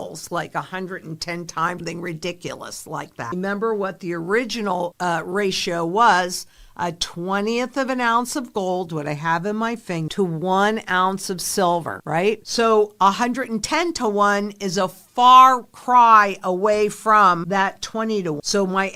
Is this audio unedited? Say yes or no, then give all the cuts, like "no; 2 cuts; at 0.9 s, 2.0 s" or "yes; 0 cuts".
yes; 0 cuts